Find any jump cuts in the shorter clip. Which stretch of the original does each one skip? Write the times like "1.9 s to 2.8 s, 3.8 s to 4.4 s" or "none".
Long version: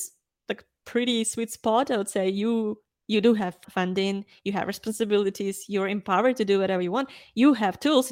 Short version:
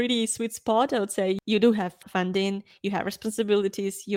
2.4 s to 3.0 s